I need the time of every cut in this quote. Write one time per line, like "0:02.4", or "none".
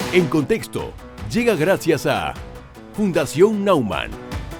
none